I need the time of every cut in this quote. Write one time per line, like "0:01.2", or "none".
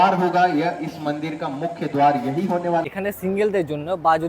0:02.8

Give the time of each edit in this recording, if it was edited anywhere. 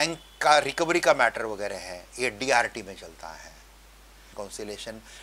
0:04.2

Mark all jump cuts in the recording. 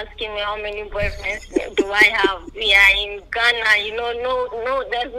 none

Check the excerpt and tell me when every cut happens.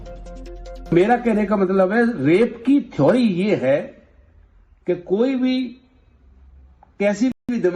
none

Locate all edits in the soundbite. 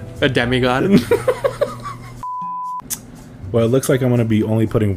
0:02.6

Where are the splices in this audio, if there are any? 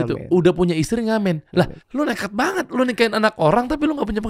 0:01.8

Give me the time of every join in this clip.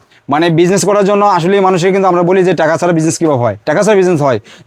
none

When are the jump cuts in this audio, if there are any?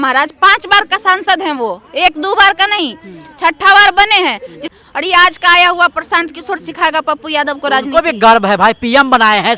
0:04.8

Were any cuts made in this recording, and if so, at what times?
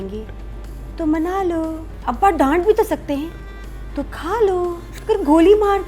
0:01.9
0:04.9

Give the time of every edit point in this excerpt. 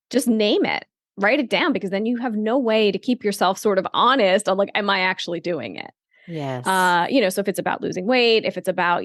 none

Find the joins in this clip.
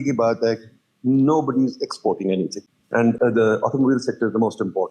0:03.2

